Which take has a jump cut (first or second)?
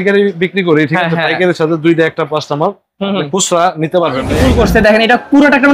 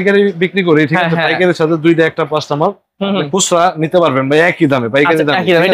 first